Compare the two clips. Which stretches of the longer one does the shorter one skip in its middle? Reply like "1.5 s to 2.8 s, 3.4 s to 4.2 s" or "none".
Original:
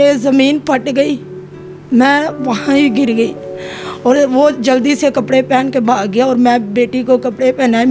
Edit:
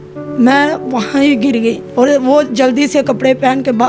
3.4 s to 3.9 s